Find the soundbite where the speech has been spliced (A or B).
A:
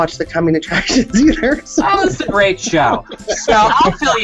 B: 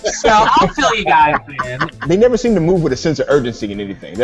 B